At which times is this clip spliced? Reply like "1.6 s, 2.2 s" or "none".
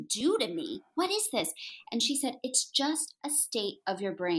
none